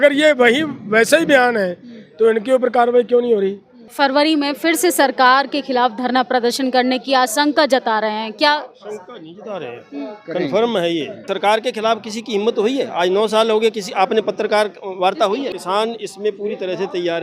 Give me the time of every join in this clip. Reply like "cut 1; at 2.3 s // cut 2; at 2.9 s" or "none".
cut 1; at 3.8 s // cut 2; at 11.2 s // cut 3; at 15.5 s